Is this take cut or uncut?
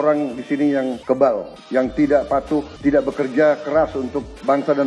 cut